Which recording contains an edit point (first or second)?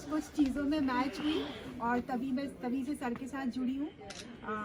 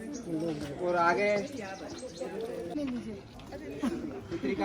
second